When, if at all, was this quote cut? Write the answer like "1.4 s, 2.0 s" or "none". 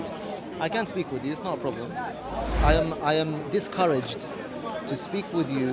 2.6 s